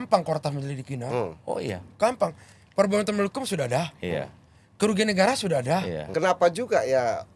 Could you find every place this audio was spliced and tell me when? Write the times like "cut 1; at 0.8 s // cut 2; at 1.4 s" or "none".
cut 1; at 6.0 s